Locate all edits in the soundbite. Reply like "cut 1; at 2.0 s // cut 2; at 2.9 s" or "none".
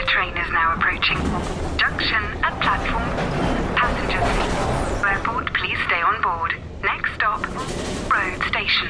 none